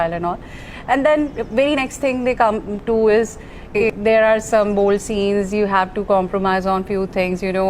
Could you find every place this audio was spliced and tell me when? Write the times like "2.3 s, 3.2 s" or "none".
3.8 s